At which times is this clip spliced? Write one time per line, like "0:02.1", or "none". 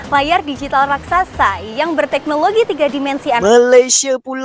0:03.4

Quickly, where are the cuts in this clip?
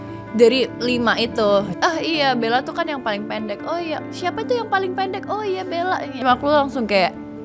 0:01.7
0:04.0
0:06.2

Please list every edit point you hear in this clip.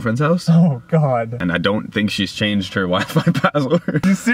0:01.3

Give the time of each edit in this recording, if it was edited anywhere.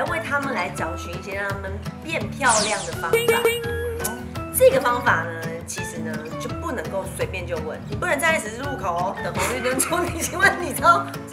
none

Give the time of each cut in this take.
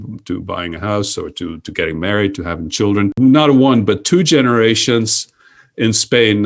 0:03.1

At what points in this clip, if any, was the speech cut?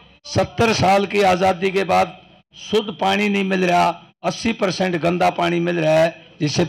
none

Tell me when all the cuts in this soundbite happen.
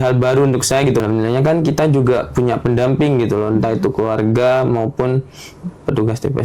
0:01.0

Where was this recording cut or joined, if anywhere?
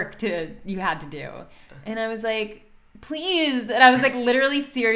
none

